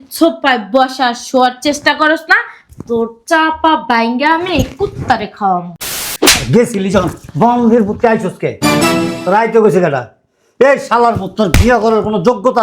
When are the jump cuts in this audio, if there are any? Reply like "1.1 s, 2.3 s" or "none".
6.0 s